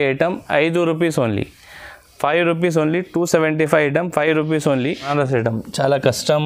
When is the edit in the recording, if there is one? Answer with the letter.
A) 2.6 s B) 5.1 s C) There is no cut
B